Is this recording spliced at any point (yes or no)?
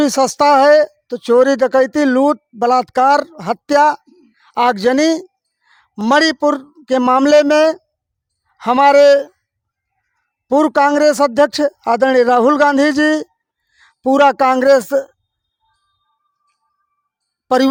no